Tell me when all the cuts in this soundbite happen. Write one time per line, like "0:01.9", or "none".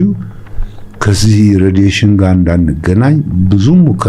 none